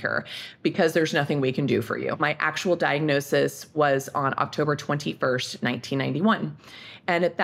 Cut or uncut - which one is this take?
cut